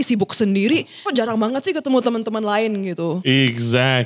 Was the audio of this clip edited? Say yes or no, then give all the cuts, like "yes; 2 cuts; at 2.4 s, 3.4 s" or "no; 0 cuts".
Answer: yes; 1 cut; at 1.0 s